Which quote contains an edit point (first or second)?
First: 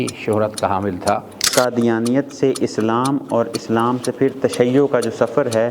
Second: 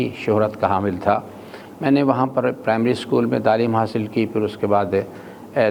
first